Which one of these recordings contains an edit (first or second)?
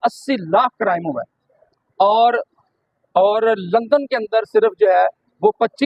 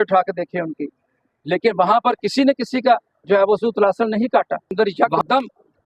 second